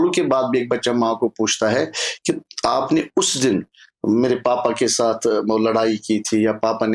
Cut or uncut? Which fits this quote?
uncut